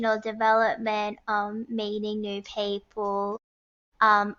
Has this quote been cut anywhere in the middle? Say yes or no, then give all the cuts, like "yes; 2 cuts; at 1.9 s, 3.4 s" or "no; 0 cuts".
no; 0 cuts